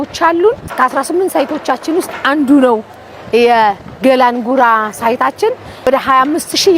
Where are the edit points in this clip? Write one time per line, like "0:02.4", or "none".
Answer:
0:05.9